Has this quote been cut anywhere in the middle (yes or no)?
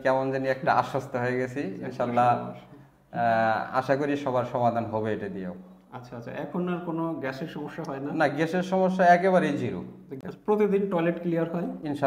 yes